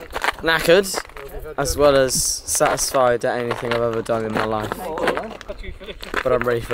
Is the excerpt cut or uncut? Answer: cut